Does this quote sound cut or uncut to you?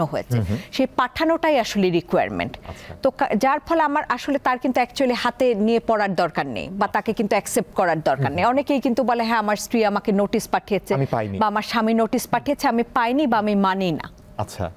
uncut